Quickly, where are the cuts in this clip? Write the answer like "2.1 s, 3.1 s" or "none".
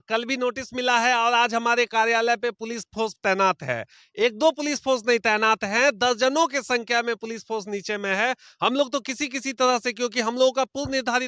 none